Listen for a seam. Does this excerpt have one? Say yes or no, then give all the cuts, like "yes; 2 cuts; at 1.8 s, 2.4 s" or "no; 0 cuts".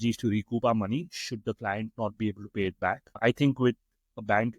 no; 0 cuts